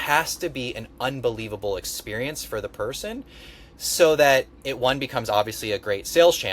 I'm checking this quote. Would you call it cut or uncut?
uncut